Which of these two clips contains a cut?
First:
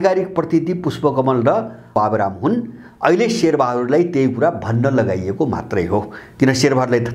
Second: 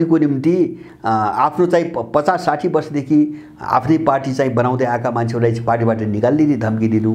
first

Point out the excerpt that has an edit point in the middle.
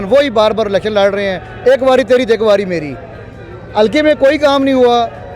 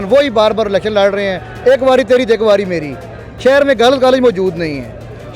second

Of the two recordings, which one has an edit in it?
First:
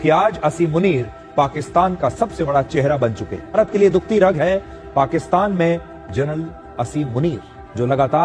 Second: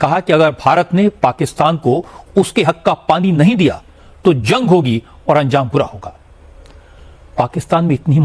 first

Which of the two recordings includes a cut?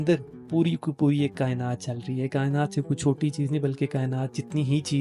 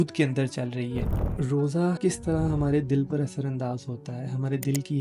second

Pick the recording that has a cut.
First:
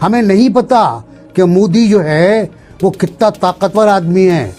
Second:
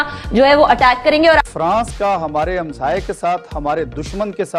second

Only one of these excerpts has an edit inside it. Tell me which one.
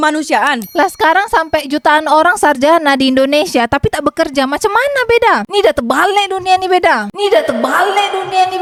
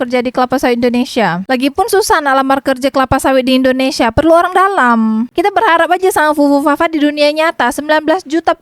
second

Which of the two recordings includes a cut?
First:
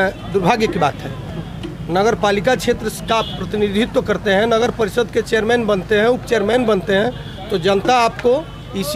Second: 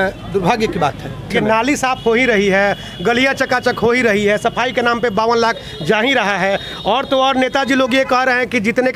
second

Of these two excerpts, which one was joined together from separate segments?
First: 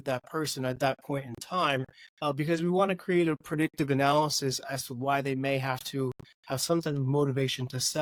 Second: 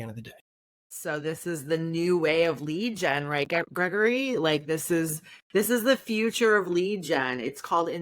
second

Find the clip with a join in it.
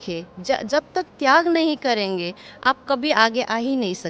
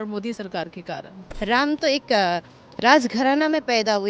second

